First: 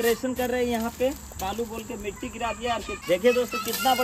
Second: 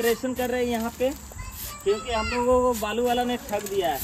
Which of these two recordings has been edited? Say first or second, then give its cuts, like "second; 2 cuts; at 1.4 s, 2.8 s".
first; 2 cuts; at 1.4 s, 2.9 s